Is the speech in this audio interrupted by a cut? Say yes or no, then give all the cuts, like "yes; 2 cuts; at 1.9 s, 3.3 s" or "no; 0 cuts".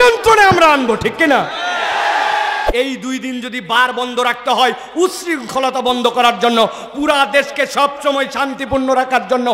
yes; 1 cut; at 2.7 s